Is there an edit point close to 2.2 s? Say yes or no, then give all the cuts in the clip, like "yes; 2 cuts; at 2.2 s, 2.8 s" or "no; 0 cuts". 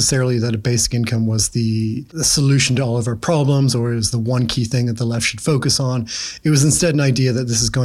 yes; 1 cut; at 2.2 s